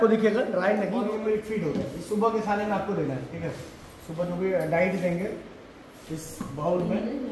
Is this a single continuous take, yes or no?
no